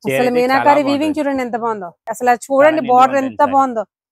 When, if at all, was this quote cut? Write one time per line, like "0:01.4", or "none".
0:02.1